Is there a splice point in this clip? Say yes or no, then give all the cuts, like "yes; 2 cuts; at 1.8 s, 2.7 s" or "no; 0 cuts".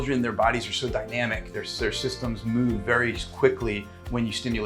no; 0 cuts